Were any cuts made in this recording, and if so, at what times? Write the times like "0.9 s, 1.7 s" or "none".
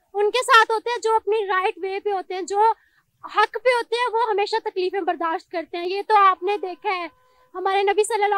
none